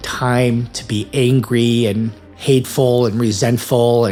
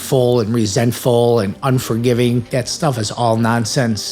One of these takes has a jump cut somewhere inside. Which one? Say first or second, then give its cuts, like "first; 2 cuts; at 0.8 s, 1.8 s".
second; 1 cut; at 2.5 s